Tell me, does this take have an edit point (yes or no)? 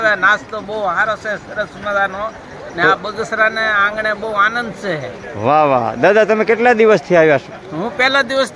no